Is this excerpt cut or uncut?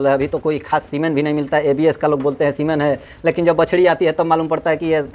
uncut